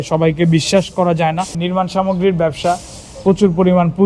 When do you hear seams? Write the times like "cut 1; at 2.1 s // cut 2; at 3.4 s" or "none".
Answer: none